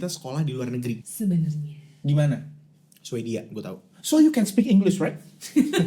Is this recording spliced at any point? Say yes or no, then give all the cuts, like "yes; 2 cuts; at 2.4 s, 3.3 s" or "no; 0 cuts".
yes; 1 cut; at 1.1 s